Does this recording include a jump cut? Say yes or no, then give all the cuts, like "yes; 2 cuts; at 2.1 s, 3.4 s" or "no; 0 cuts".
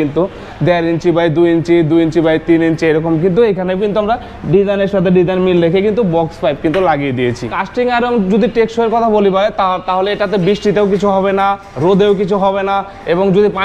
yes; 1 cut; at 7.5 s